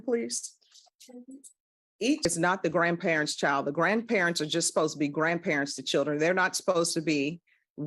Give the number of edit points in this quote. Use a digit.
1